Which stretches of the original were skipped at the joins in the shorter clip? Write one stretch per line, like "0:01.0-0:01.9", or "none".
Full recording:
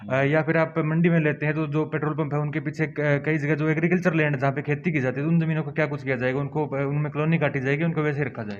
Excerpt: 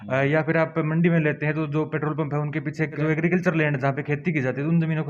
0:03.0-0:03.6

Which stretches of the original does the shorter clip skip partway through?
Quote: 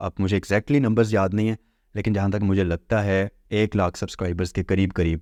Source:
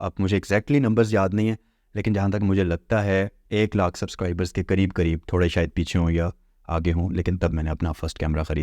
none

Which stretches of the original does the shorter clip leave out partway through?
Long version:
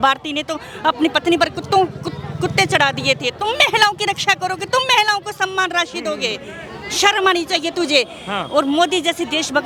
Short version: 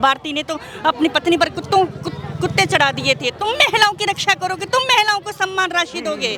none

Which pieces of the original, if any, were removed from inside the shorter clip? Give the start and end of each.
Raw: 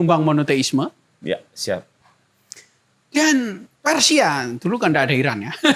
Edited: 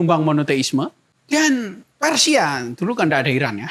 0:01.1-0:02.9

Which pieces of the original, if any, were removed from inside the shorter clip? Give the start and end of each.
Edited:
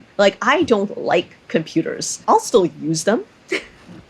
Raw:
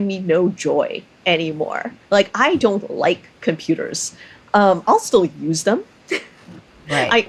0:04.1-0:04.8

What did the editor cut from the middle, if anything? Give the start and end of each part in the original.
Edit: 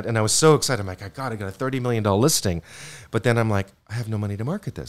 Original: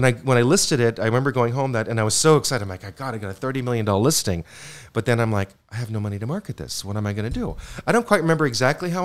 none

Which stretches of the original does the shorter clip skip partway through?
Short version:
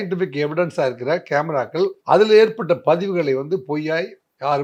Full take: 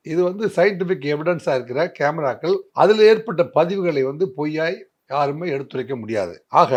none

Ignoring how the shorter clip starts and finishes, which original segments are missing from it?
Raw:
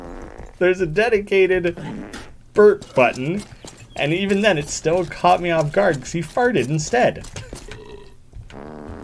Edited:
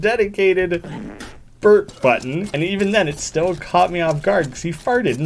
0:03.4-0:04.0

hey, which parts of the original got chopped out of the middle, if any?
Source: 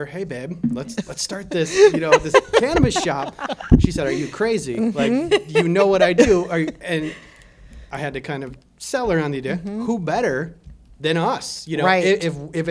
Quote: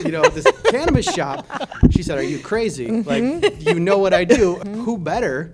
0:06.5-0:09.6

